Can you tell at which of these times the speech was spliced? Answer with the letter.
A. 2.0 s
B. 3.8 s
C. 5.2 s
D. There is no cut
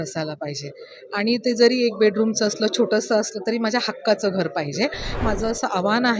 C